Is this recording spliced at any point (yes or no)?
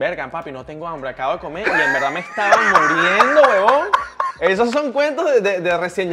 no